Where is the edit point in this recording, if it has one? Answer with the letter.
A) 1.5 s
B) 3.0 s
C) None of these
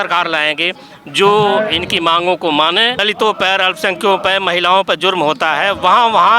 B